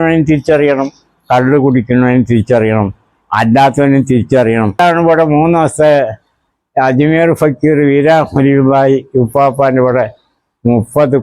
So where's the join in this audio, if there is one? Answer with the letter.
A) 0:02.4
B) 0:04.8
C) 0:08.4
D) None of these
B